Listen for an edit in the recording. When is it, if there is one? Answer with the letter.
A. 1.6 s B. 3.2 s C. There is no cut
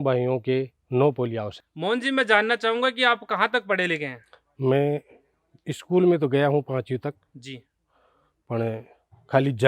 A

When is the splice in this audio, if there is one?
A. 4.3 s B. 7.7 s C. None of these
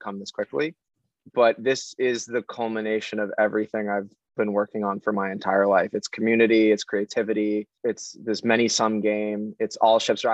B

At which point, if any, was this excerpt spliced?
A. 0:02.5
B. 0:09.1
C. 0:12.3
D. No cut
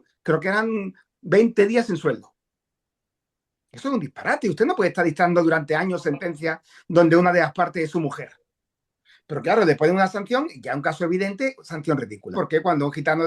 C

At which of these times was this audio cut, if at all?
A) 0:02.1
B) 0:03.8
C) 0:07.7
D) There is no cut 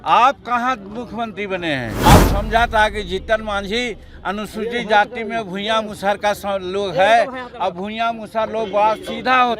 A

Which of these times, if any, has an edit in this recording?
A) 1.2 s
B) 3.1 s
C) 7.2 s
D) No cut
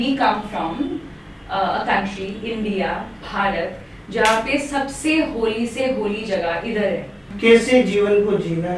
C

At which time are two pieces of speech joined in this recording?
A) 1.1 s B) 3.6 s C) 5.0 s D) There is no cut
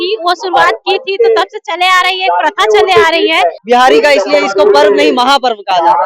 B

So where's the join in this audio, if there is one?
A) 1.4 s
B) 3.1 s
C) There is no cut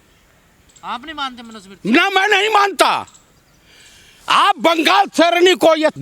C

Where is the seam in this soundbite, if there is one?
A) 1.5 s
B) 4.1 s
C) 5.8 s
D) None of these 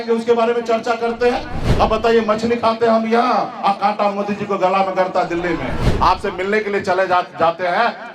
C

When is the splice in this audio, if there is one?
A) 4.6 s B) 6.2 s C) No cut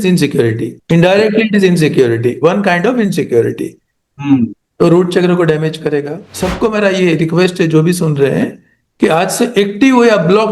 B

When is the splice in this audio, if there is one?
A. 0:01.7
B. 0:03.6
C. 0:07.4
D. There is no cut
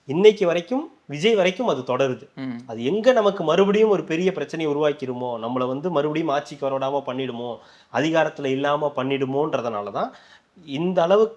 D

